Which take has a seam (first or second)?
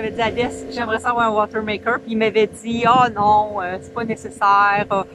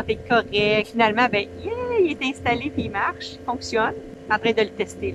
second